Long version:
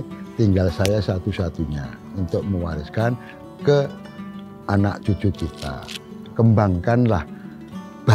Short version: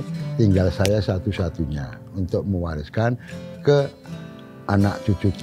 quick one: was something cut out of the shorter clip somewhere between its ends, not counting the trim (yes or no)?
no